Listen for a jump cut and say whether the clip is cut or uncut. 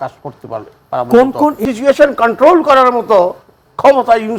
cut